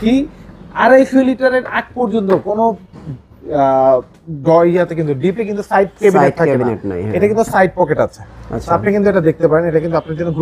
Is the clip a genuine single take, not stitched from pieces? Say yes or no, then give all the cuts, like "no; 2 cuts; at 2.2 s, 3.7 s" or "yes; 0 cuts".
yes; 0 cuts